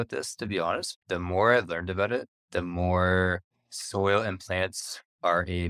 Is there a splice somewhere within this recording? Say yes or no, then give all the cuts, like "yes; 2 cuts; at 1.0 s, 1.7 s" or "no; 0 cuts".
yes; 1 cut; at 1.0 s